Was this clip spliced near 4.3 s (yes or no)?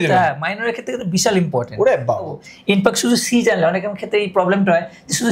no